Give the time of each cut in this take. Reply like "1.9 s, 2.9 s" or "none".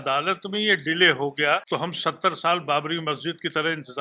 1.6 s